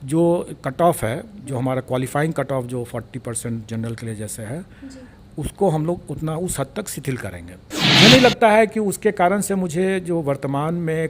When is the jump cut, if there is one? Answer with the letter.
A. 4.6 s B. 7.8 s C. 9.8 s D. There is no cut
B